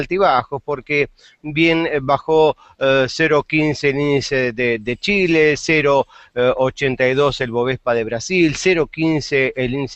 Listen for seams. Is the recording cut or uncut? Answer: cut